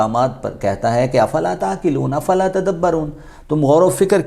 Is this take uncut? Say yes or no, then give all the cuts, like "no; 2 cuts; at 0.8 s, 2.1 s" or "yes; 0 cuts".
yes; 0 cuts